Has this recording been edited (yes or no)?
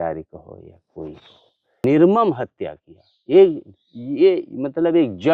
yes